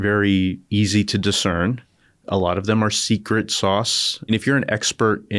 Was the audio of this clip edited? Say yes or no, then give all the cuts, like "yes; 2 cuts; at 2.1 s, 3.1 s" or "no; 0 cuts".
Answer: yes; 1 cut; at 4.3 s